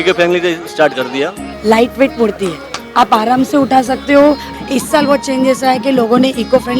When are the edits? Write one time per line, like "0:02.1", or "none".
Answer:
0:01.5
0:04.5